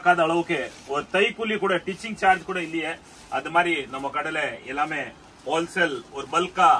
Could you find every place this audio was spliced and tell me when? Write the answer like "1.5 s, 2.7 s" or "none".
none